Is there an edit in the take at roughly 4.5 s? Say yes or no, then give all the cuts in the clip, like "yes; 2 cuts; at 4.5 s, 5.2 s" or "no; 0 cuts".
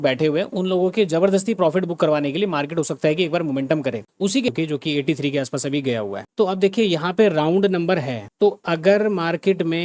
yes; 1 cut; at 4.5 s